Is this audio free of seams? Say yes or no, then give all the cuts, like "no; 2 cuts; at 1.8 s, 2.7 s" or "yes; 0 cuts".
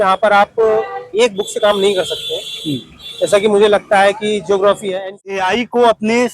no; 1 cut; at 5.1 s